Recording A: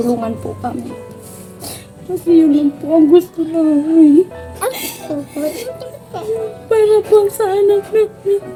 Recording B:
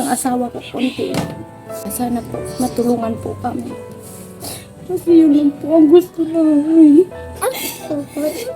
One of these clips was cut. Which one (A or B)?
B